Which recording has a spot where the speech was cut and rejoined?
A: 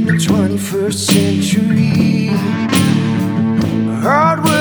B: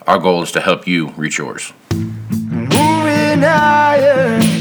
B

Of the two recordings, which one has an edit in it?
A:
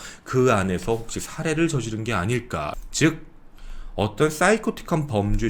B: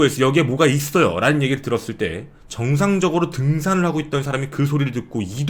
A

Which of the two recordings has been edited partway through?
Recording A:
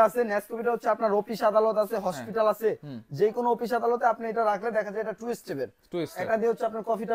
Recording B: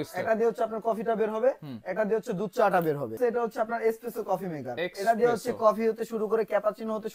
B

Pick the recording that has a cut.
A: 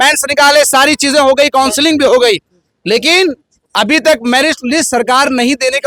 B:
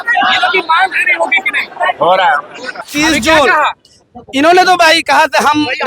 B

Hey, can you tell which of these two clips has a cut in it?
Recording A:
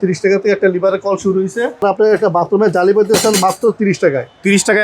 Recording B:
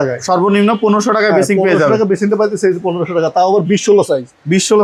A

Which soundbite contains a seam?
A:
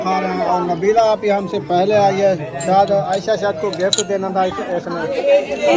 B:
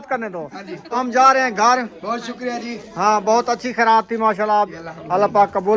B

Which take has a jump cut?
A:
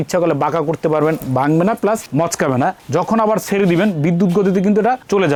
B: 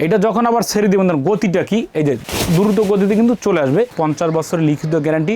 B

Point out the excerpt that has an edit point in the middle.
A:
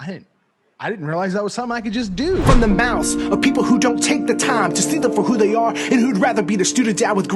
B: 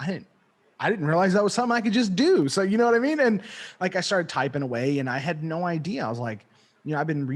A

